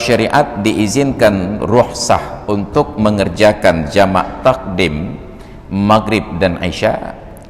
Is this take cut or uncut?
uncut